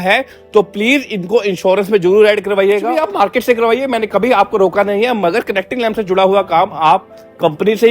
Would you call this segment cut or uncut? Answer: cut